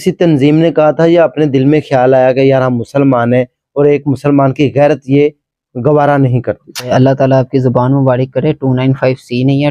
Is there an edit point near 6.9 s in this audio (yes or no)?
yes